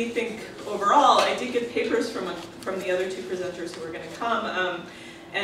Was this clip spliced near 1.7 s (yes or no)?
yes